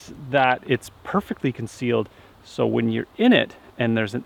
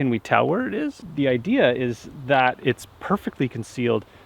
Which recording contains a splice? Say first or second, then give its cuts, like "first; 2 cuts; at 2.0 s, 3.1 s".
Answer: second; 1 cut; at 1.0 s